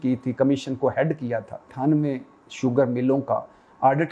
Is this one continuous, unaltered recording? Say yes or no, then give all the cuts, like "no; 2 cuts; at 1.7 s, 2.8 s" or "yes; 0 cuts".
no; 1 cut; at 1.7 s